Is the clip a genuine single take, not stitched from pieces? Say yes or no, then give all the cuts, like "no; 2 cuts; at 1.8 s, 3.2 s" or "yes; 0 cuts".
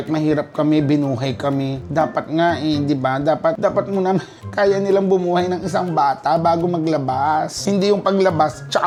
yes; 0 cuts